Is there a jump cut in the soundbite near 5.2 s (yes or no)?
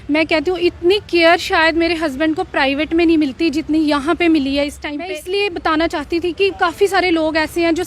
yes